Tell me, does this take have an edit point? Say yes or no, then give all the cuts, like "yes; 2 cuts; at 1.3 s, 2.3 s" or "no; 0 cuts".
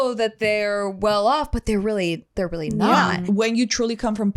yes; 1 cut; at 3.2 s